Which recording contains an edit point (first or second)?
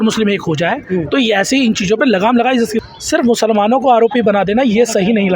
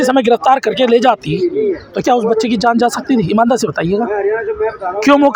first